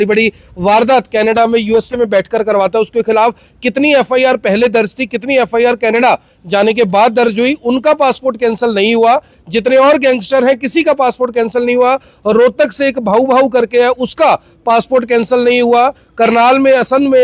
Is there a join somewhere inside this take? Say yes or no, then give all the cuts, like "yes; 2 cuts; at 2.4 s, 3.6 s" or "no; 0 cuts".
no; 0 cuts